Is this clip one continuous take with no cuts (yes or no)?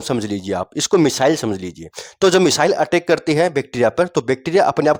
yes